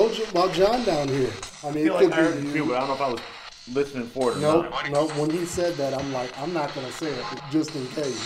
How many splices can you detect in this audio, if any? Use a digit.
1